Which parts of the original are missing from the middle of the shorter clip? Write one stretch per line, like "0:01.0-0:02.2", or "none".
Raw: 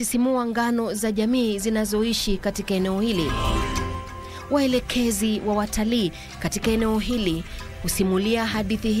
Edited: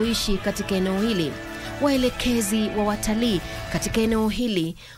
0:03.4-0:04.1

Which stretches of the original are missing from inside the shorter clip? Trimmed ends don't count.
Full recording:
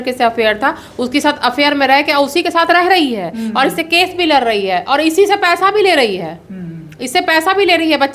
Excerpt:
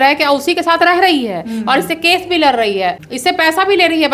0:04.8-0:06.8

